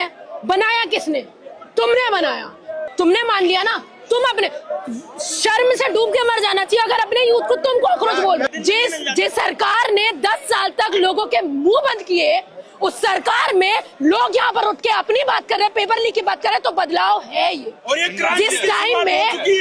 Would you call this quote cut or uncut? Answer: cut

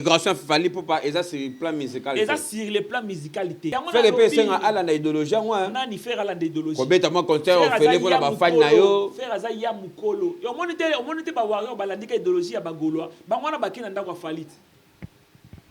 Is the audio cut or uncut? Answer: cut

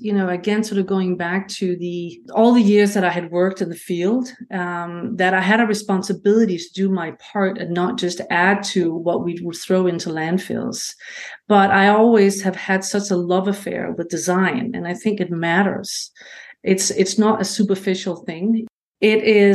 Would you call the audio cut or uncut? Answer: cut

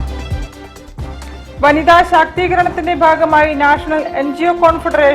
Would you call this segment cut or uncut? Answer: uncut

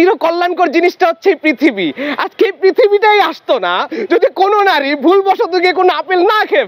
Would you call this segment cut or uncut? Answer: uncut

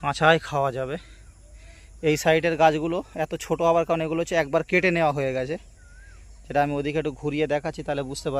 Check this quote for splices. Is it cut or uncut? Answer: uncut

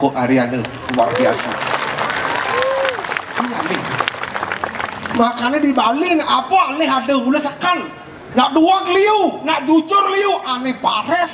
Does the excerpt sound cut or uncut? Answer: uncut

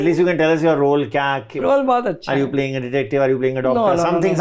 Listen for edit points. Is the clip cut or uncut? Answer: cut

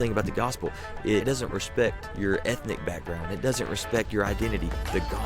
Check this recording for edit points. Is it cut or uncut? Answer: cut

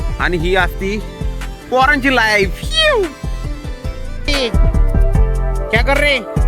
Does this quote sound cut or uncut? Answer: cut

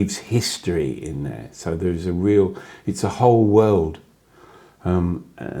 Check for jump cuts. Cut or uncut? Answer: uncut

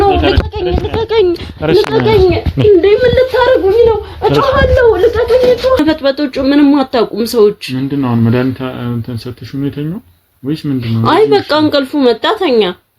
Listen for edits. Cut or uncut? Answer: cut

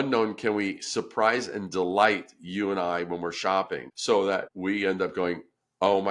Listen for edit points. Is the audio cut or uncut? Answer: cut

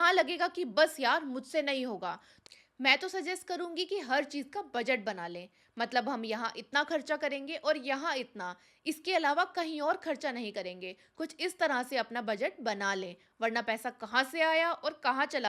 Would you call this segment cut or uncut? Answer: cut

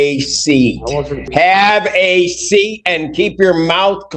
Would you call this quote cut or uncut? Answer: cut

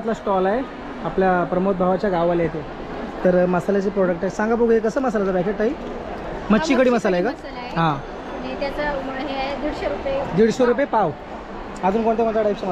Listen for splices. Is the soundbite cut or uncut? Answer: uncut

